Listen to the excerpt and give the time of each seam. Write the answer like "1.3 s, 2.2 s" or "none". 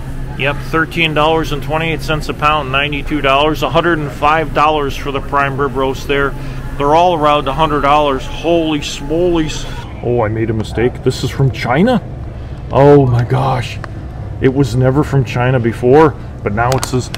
9.8 s